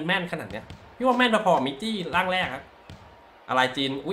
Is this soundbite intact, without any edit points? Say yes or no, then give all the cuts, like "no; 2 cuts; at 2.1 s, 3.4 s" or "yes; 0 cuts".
yes; 0 cuts